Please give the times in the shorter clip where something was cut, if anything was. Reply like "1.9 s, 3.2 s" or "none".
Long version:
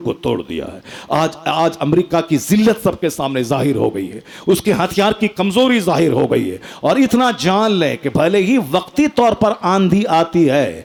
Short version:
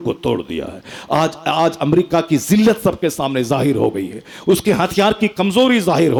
none